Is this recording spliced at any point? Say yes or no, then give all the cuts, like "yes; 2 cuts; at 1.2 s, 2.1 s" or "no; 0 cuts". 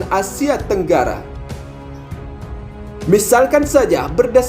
yes; 2 cuts; at 1.2 s, 3.1 s